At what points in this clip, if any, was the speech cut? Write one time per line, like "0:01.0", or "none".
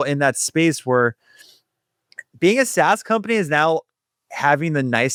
none

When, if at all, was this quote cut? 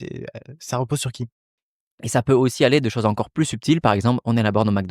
0:01.3

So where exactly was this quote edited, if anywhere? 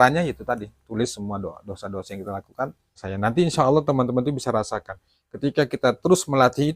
0:03.1

